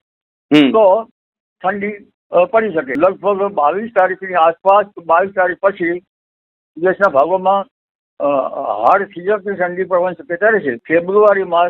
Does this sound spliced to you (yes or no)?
yes